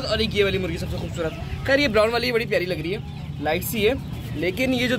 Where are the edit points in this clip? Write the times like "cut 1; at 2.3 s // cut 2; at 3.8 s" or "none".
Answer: none

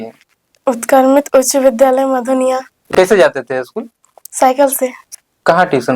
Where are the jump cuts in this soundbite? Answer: cut 1; at 2.9 s // cut 2; at 5.1 s

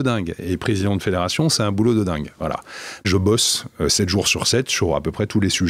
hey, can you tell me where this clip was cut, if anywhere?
cut 1; at 3.0 s

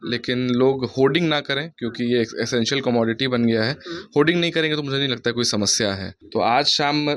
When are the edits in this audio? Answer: cut 1; at 6.2 s

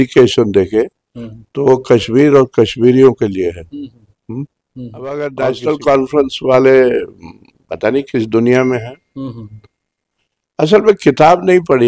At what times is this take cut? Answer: cut 1; at 5.1 s

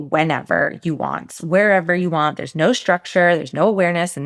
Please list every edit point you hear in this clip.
none

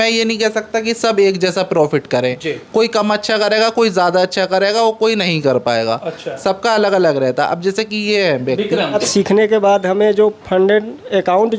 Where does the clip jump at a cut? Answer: cut 1; at 9.0 s

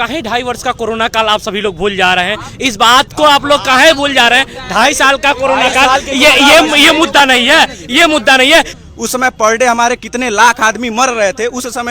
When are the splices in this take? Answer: cut 1; at 8.8 s

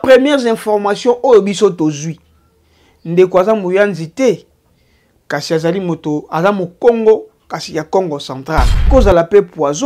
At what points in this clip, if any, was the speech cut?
cut 1; at 8.9 s

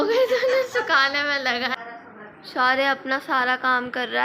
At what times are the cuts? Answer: cut 1; at 1.8 s

